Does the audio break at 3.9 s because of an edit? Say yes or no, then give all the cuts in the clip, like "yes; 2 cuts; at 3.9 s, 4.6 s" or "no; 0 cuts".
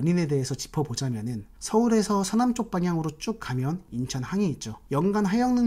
yes; 1 cut; at 3.9 s